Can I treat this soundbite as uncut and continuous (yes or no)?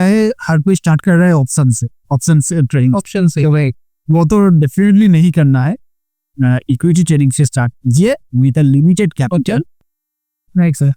no